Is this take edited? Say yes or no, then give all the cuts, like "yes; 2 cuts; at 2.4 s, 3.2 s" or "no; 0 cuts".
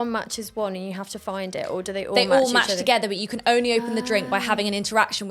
no; 0 cuts